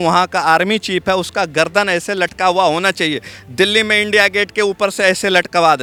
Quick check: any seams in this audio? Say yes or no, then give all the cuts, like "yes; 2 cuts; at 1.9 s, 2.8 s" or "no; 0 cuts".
no; 0 cuts